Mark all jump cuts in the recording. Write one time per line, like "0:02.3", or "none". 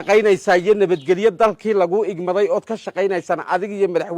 none